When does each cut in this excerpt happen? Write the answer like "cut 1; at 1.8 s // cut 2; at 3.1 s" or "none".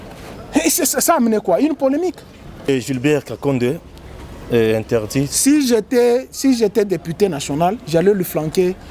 cut 1; at 2.7 s